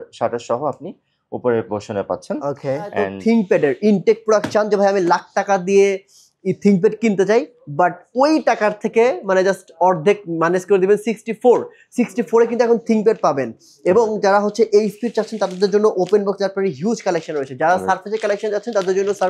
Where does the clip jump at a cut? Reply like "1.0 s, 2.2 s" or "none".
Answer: 3.1 s